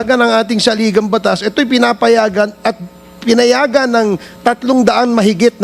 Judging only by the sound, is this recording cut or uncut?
uncut